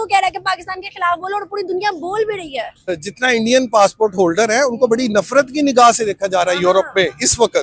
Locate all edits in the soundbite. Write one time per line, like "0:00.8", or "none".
0:03.0